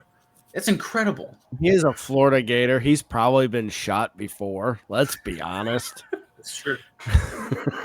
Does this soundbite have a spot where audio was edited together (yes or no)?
yes